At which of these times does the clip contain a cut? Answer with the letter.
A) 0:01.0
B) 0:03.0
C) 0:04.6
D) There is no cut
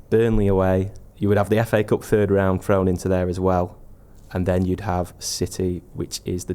A